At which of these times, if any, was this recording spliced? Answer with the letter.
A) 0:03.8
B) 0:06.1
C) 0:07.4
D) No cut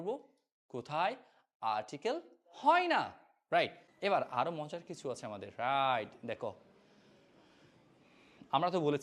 A